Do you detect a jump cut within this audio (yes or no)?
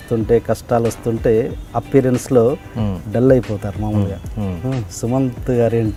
no